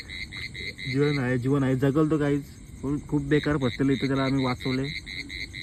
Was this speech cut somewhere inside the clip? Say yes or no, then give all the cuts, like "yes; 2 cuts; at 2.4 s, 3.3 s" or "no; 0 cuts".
no; 0 cuts